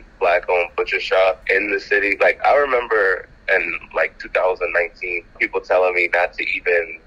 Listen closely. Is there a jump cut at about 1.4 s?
yes; 1 cut; at 1.4 s

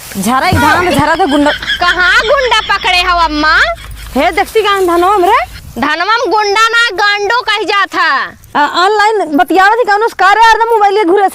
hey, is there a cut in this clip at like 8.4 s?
yes; 1 cut; at 8.4 s

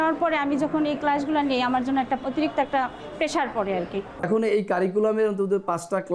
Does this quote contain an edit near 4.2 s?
yes; 2 cuts; at 2.2 s, 4.2 s

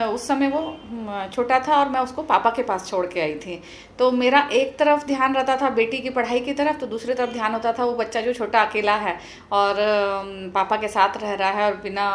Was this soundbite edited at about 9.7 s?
no; 0 cuts

